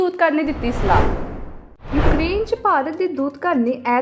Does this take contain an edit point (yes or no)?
no